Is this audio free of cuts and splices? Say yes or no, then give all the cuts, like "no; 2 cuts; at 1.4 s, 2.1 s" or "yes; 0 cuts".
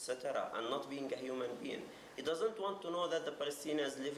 yes; 0 cuts